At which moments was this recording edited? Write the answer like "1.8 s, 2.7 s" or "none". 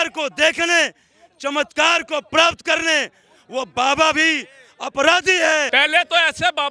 5.7 s

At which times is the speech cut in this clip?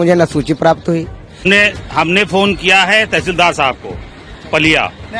1.4 s

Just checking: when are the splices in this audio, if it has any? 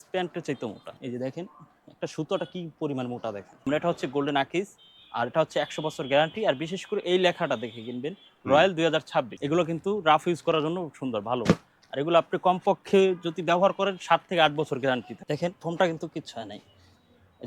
0.9 s, 3.7 s, 9.4 s, 15.1 s

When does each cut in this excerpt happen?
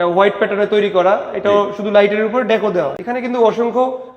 3.0 s

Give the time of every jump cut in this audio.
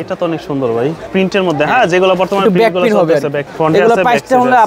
1.1 s, 3.4 s

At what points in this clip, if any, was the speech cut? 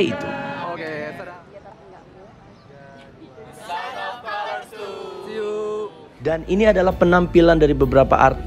none

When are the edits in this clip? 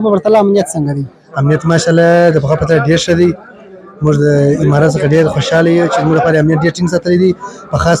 none

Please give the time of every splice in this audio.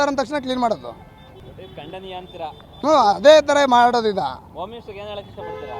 1.3 s

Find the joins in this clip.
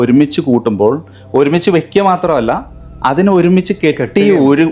none

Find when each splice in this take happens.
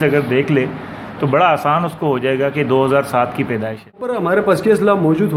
4.1 s

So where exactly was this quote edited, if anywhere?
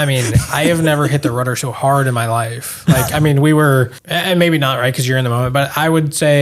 4.0 s

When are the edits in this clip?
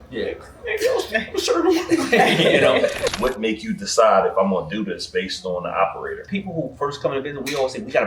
3.1 s, 6.2 s

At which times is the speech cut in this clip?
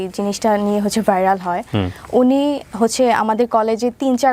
none

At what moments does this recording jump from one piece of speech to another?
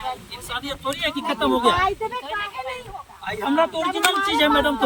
none

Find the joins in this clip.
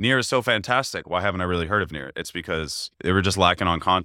1.0 s, 2.8 s

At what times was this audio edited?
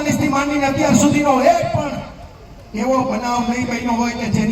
none

